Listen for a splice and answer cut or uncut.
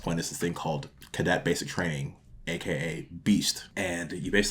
cut